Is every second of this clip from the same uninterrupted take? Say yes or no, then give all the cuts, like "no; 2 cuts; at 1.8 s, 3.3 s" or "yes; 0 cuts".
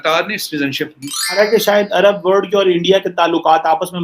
no; 1 cut; at 1.4 s